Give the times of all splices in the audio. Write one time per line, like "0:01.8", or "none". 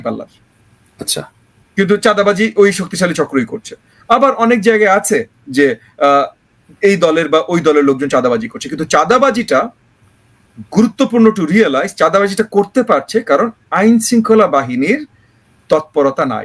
none

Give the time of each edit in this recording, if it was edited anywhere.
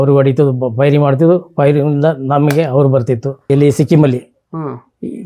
0:03.4

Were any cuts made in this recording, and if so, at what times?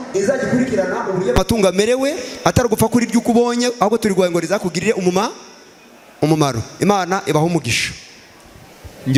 none

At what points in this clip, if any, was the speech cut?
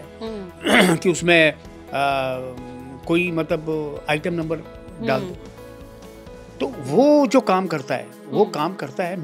none

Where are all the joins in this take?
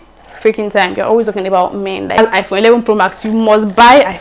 0:02.2

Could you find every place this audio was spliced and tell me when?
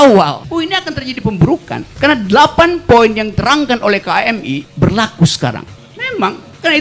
0:04.7
0:05.7

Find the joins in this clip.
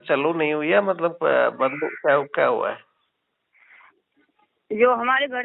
none

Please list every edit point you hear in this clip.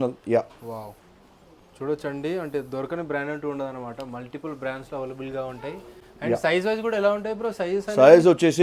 none

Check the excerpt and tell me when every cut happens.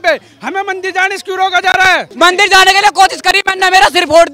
0:02.1

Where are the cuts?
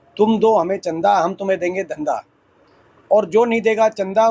none

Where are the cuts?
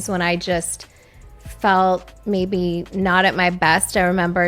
none

